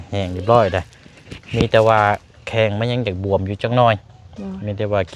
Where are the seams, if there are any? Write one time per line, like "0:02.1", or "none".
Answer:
none